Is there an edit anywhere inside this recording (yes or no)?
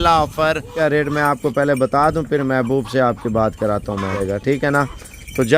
yes